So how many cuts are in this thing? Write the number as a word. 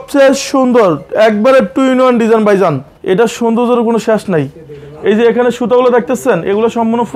one